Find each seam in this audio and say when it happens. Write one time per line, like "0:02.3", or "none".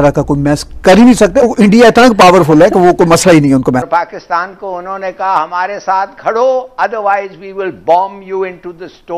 0:01.4
0:03.9